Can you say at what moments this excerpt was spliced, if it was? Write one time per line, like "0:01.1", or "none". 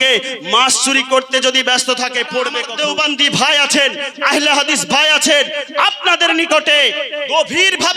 0:02.7